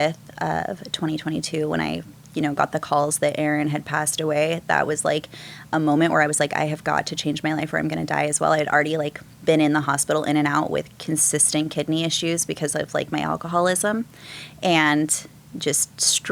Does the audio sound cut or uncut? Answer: uncut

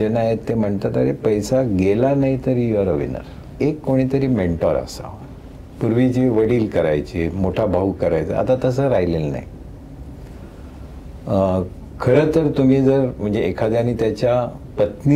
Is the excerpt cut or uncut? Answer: cut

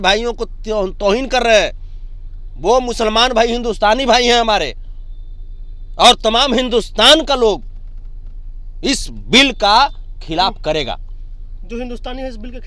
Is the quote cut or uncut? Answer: uncut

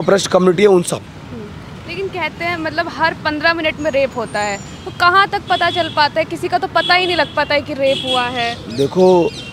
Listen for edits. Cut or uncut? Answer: uncut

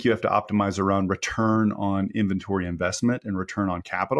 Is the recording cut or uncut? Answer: uncut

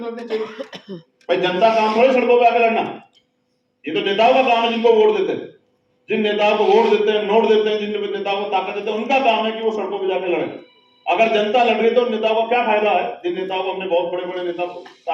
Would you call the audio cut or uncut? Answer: uncut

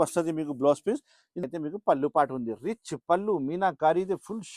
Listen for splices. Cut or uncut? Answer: cut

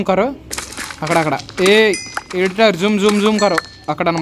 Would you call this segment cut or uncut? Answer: uncut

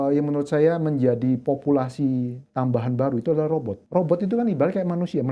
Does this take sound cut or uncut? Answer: cut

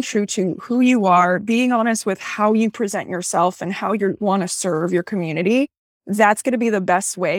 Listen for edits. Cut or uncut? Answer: uncut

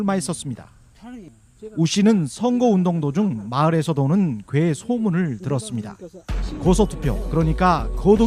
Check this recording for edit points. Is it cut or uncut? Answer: cut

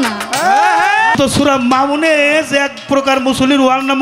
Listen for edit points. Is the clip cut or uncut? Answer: cut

